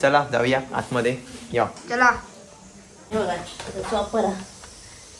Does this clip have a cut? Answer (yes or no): yes